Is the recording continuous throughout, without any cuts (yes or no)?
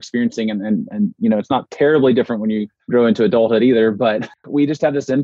no